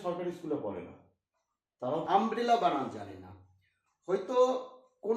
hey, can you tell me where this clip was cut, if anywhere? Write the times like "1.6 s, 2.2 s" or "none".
2.0 s